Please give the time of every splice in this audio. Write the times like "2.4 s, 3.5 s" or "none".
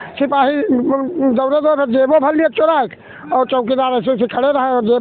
none